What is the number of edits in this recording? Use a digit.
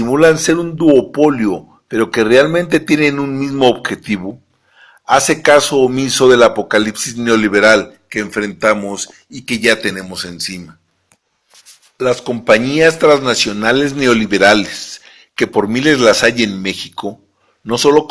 0